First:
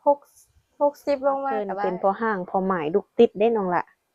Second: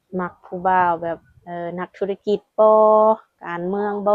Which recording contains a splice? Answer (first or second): first